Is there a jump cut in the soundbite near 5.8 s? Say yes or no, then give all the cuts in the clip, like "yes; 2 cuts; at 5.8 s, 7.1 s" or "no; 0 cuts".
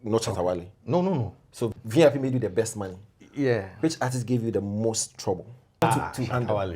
yes; 2 cuts; at 1.7 s, 5.8 s